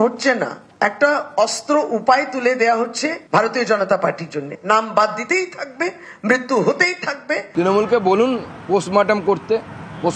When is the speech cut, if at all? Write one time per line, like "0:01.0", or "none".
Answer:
none

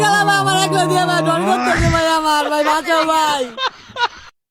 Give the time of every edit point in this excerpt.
none

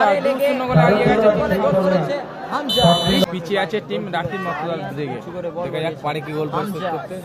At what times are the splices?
0:03.2

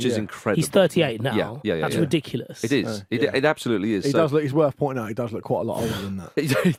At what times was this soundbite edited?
none

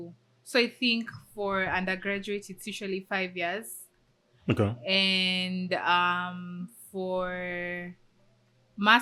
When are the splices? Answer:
none

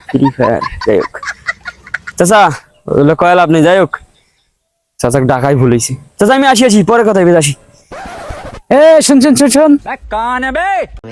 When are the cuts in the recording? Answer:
none

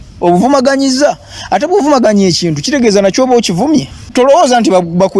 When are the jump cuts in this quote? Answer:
0:04.0

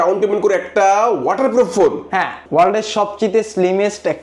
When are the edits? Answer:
0:02.4

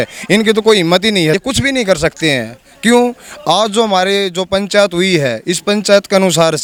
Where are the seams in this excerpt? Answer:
none

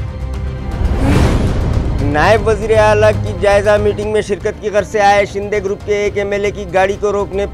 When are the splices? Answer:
0:01.7

